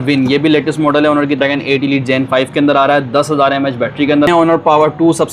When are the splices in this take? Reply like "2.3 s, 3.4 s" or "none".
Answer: 1.4 s, 4.3 s